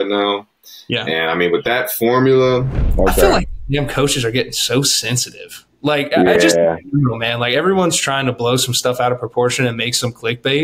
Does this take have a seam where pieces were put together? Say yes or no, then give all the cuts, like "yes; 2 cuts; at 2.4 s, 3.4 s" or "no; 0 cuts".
yes; 1 cut; at 2.8 s